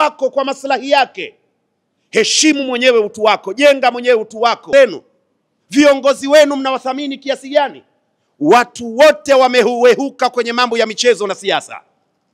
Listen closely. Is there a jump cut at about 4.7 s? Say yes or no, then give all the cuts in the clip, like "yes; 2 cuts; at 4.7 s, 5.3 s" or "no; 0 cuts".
yes; 1 cut; at 4.7 s